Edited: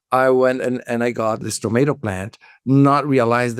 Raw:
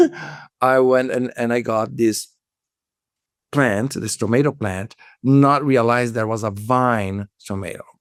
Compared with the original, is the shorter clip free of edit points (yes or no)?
no